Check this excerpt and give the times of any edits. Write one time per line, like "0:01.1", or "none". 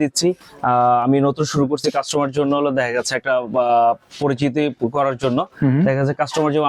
none

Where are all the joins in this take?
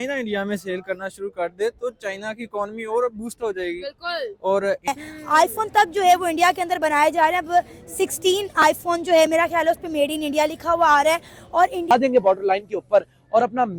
0:04.9
0:11.9

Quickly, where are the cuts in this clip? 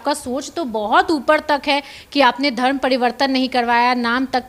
none

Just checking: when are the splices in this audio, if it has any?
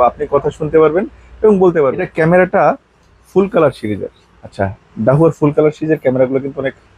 0:02.1

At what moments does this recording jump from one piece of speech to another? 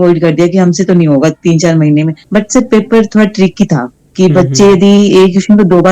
0:02.2

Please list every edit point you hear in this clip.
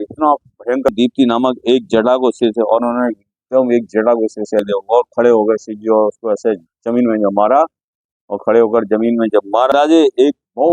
0:00.9
0:04.6
0:09.7

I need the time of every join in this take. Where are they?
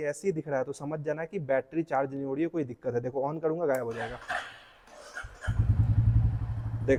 none

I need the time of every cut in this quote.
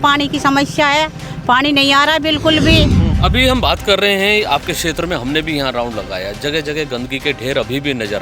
0:03.0

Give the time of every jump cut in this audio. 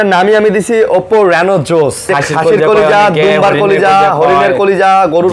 0:02.1

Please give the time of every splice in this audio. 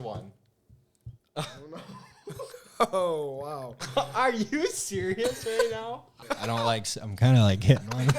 0:06.1

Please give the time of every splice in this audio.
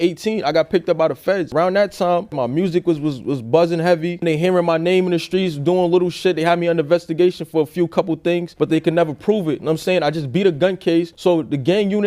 0:01.5
0:04.2

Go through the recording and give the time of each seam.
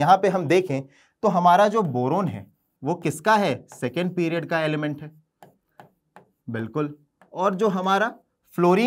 none

